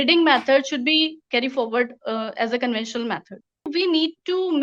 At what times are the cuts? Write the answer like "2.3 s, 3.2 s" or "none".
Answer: 1.2 s, 3.7 s